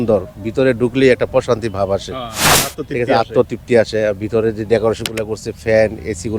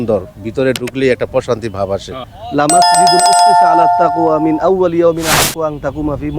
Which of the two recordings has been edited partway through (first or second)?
second